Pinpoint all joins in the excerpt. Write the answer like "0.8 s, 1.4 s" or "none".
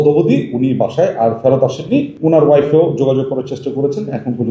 2.1 s